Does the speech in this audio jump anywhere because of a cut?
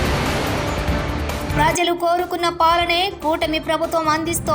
yes; 1 cut; at 1.5 s

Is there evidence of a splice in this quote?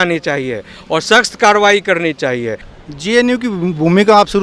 yes; 1 cut; at 2.6 s

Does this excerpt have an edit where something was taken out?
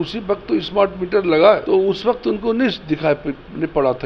yes; 1 cut; at 1.6 s

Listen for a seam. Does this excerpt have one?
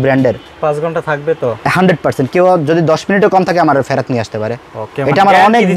no; 0 cuts

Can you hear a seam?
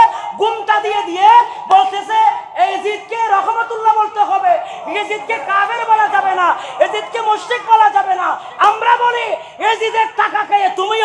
no; 0 cuts

